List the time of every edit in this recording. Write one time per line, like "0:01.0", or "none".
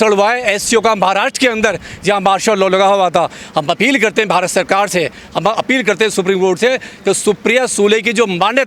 none